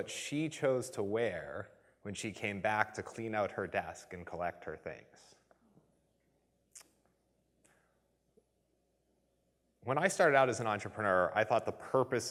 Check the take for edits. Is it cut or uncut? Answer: uncut